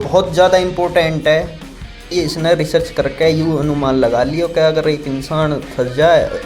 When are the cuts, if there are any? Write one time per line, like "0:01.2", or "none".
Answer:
0:02.0